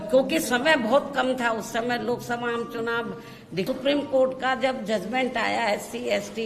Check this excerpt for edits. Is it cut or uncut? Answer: cut